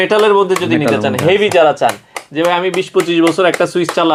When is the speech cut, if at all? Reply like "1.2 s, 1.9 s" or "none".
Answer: none